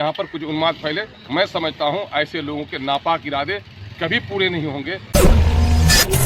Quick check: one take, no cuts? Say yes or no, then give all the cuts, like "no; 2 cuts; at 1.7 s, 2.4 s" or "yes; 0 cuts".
no; 1 cut; at 5.0 s